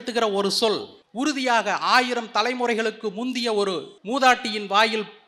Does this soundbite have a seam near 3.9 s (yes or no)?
yes